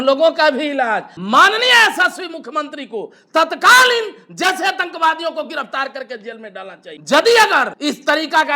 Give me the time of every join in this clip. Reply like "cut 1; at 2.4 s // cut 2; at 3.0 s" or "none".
cut 1; at 1.1 s // cut 2; at 6.9 s // cut 3; at 7.7 s